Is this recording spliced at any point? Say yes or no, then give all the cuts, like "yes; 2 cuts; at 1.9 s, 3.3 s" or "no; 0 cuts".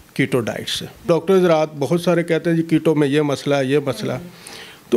yes; 1 cut; at 1.0 s